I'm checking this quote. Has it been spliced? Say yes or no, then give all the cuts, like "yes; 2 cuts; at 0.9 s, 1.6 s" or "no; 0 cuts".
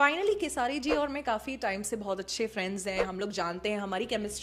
no; 0 cuts